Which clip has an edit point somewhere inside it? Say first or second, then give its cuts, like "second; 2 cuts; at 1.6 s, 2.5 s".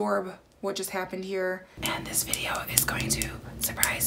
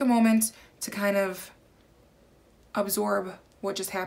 first; 1 cut; at 2.0 s